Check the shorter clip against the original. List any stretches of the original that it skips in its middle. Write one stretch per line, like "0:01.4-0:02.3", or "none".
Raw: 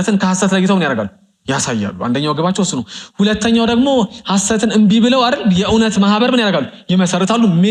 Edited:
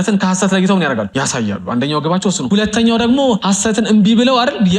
0:01.1-0:01.4
0:02.8-0:03.1
0:04.1-0:04.3